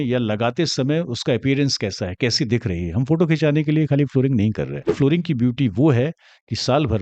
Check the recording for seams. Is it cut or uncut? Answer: cut